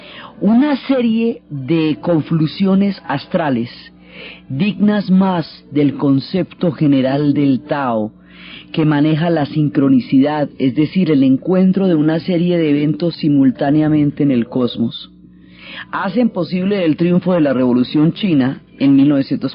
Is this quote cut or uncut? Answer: cut